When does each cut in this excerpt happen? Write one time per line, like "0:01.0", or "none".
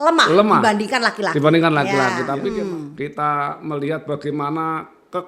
0:02.4